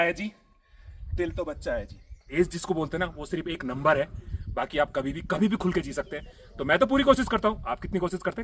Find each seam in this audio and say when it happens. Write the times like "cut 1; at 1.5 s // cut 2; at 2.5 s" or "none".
cut 1; at 2.3 s